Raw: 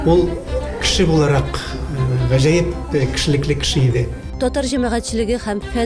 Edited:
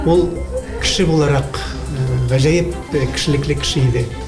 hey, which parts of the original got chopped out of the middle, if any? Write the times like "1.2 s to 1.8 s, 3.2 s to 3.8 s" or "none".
none

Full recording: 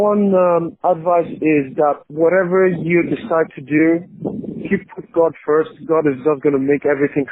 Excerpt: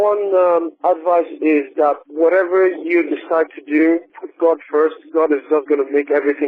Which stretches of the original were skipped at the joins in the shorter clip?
4.2 s to 5.0 s

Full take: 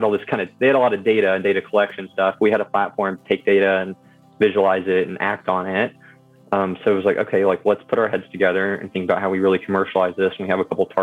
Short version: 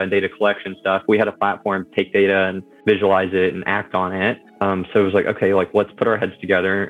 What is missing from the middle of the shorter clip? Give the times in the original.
4.0 s to 4.2 s, 6.0 s to 6.4 s

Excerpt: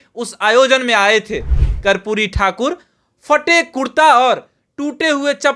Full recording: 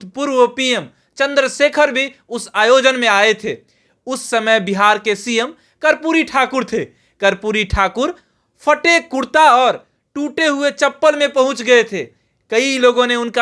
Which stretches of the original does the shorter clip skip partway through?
3.8 s to 7.0 s

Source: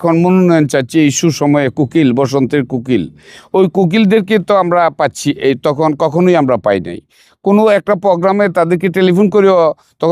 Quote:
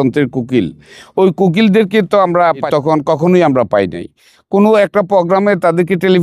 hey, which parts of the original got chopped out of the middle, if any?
5.0 s to 5.6 s

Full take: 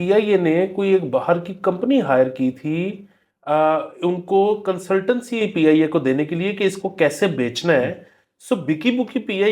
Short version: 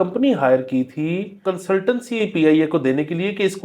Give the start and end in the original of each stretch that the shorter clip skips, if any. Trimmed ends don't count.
3.1 s to 4.6 s

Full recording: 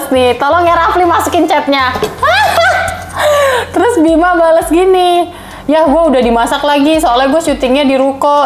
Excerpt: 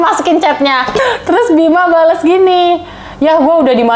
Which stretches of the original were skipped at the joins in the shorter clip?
2.1 s to 3.5 s

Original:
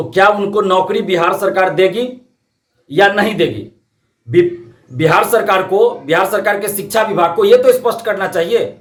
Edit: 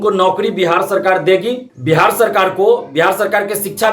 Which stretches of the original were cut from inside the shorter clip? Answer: 2.2 s to 4.8 s

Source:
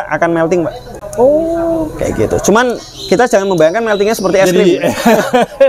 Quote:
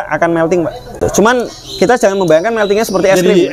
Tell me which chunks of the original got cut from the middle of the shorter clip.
1.0 s to 2.3 s

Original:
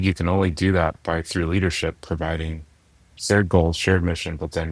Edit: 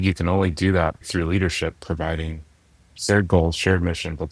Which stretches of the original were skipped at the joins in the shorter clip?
1.0 s to 1.2 s

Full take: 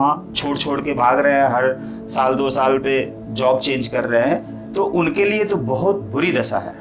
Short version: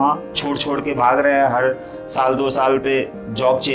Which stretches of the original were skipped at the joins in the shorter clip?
none

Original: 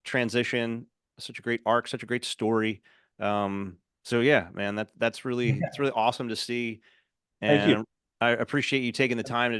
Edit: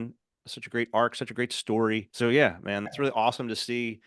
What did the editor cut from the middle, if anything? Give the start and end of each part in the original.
2.8 s to 4.0 s, 4.8 s to 5.7 s

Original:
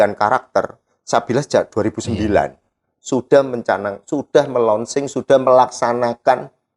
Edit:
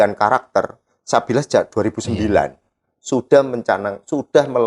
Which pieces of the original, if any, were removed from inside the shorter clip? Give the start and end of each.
none

